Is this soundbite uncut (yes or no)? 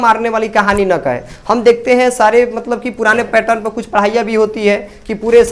yes